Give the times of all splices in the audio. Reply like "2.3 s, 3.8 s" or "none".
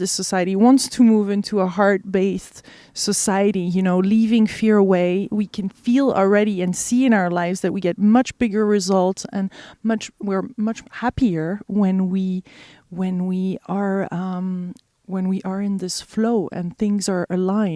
10.2 s